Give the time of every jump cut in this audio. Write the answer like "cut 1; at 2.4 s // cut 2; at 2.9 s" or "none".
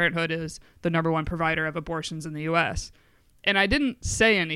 none